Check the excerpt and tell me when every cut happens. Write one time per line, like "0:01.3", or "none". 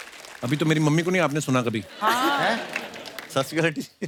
none